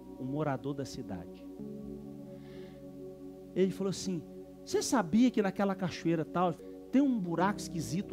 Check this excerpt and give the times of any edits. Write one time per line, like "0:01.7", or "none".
0:01.6
0:06.6